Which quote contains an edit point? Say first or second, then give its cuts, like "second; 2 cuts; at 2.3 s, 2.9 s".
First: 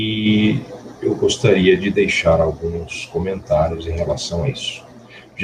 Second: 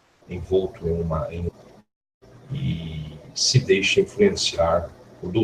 second; 1 cut; at 2.4 s